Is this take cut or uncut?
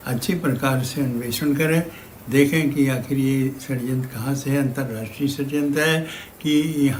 uncut